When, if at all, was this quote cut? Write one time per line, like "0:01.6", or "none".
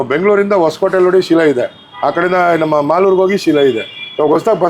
none